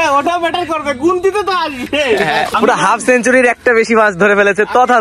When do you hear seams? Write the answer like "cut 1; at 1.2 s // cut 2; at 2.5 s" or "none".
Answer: cut 1; at 2.5 s